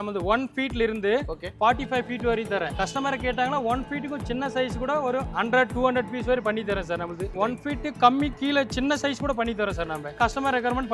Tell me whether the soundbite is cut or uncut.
uncut